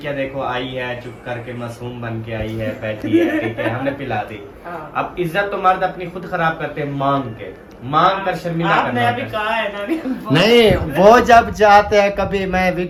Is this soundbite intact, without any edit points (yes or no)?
yes